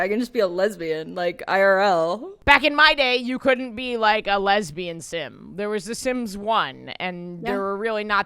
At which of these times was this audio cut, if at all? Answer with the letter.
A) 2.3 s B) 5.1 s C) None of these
A